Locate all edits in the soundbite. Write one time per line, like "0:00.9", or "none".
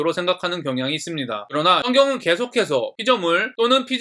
0:01.8